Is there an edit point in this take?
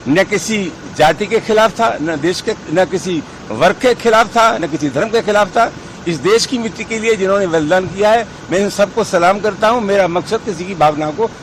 no; 0 cuts

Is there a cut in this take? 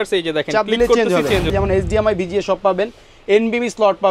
yes; 1 cut; at 1.5 s

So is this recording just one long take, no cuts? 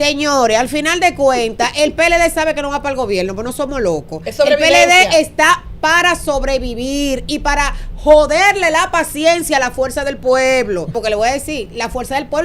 no; 1 cut; at 10.9 s

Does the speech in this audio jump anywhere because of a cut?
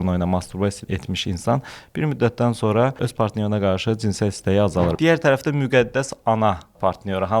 yes; 3 cuts; at 0.8 s, 3.1 s, 4.9 s

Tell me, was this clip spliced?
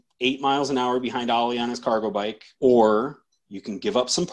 yes; 1 cut; at 2.4 s

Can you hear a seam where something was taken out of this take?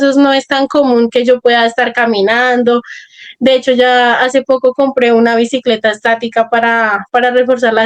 no; 0 cuts

